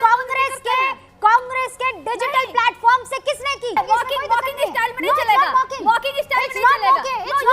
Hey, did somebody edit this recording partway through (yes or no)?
yes